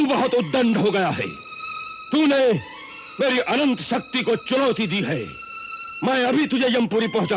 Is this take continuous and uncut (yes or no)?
yes